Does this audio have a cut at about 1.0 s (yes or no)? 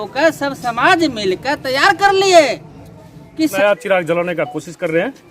no